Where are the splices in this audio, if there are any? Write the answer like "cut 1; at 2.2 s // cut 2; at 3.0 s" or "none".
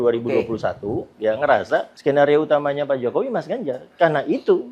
cut 1; at 1.9 s